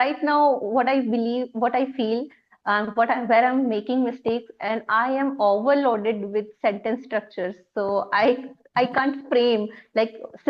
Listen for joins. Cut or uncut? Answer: uncut